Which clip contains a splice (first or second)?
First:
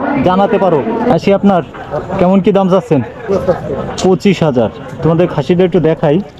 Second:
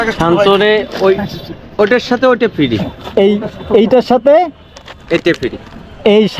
first